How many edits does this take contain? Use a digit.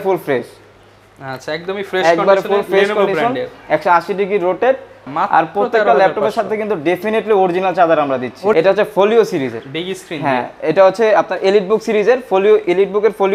2